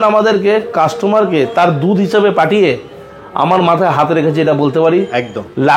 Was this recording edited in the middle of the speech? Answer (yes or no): no